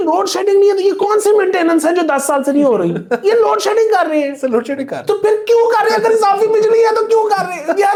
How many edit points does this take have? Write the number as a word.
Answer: zero